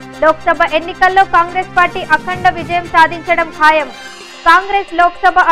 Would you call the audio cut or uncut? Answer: uncut